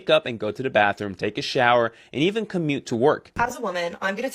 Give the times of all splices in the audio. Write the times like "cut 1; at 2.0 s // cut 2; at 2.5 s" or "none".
cut 1; at 3.3 s